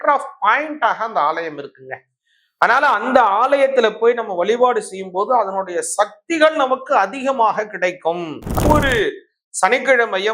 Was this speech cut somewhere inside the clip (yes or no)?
yes